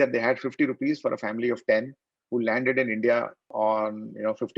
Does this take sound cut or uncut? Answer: cut